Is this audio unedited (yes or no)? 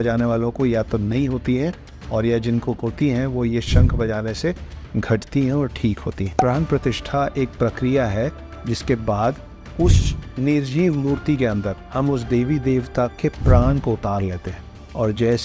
no